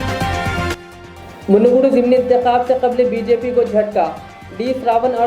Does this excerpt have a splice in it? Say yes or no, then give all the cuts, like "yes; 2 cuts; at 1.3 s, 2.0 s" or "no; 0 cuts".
yes; 1 cut; at 1.0 s